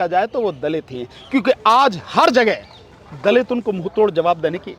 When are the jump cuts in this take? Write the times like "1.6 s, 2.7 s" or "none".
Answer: none